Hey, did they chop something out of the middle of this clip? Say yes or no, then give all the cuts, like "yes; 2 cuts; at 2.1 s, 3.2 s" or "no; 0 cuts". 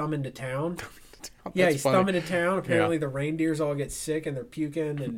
no; 0 cuts